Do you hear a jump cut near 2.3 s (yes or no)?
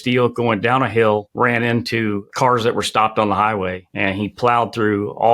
yes